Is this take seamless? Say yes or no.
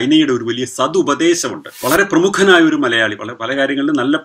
no